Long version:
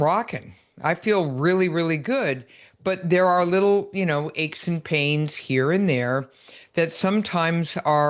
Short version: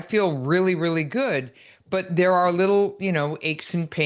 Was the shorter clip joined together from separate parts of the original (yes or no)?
no